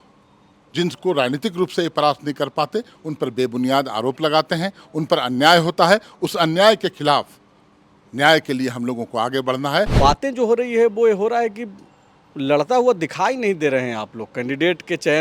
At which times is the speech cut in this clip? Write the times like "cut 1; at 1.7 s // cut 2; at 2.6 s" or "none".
cut 1; at 9.9 s